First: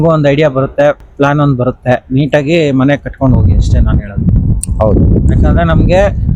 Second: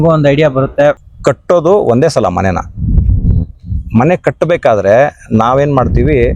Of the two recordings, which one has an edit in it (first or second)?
second